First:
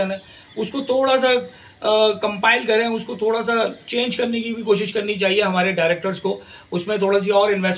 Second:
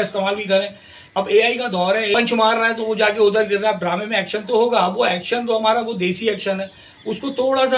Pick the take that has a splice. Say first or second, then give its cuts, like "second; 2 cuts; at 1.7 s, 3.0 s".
second; 2 cuts; at 1.1 s, 2.1 s